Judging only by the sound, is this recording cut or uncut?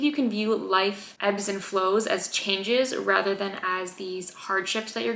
cut